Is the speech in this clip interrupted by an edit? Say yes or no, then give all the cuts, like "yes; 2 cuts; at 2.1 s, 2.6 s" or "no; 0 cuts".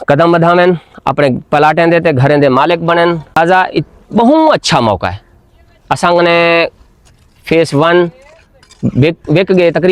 yes; 1 cut; at 3.3 s